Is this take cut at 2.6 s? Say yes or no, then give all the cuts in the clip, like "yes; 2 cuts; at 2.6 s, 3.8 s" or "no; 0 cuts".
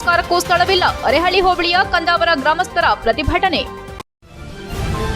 no; 1 cut; at 3.8 s